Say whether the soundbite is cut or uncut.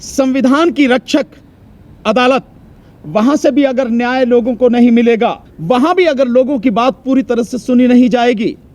cut